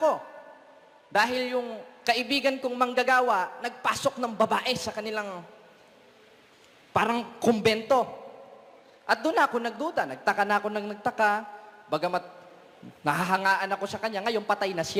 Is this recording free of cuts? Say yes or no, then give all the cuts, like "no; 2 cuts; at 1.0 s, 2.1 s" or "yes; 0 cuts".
yes; 0 cuts